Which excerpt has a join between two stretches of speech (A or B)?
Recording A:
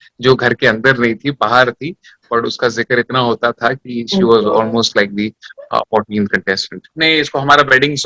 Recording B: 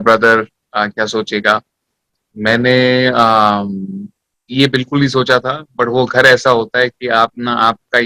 A